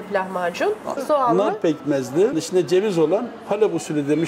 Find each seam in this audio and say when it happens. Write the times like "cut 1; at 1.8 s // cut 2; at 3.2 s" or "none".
cut 1; at 1.0 s // cut 2; at 2.4 s